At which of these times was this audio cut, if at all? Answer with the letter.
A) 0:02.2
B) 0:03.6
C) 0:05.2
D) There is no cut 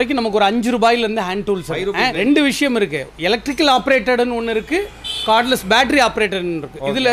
A